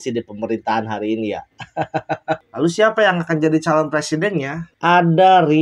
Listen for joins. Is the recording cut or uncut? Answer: cut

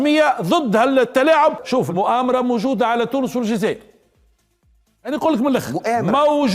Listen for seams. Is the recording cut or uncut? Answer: cut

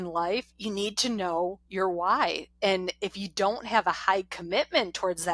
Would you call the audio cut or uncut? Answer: uncut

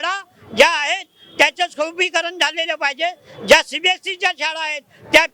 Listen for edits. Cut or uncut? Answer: uncut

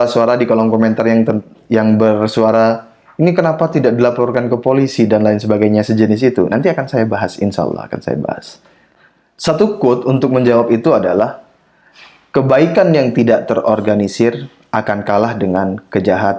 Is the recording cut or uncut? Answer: uncut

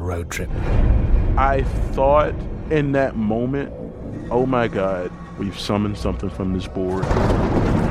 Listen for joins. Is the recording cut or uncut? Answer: uncut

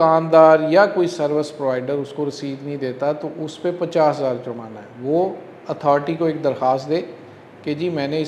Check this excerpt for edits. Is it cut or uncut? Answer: uncut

